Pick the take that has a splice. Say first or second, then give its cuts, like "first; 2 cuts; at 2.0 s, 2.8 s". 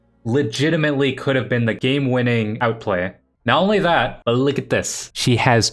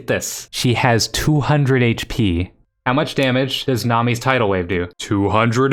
first; 2 cuts; at 1.8 s, 2.5 s